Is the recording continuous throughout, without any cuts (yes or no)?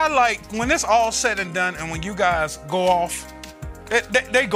yes